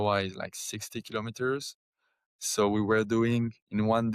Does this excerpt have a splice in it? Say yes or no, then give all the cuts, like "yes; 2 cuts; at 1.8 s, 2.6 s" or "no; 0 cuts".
no; 0 cuts